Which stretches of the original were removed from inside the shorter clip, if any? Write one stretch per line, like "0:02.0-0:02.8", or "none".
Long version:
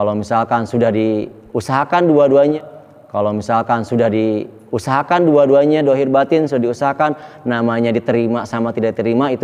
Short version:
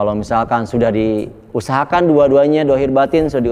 0:02.5-0:05.7